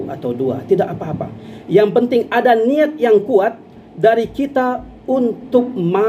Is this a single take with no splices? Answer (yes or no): yes